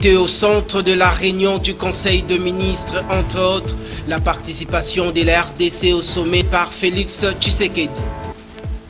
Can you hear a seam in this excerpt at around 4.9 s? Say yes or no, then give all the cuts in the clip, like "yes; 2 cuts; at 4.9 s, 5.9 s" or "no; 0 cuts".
no; 1 cut; at 6.4 s